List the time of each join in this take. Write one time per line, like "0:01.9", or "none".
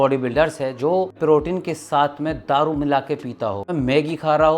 0:01.2
0:03.7